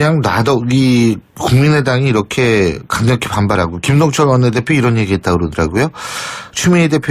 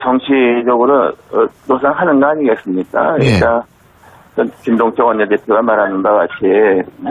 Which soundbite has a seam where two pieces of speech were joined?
first; 1 cut; at 5.4 s

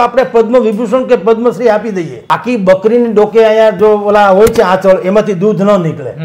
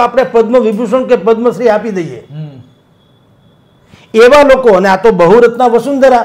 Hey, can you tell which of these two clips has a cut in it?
first; 1 cut; at 2.3 s

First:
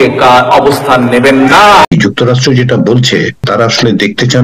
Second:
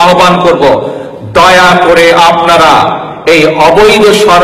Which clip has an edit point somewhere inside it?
first; 1 cut; at 1.9 s

